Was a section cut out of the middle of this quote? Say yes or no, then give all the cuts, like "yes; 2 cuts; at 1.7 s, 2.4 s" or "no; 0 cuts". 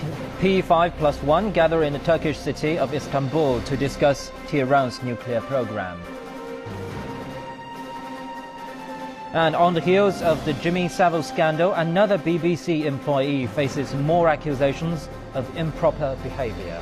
no; 0 cuts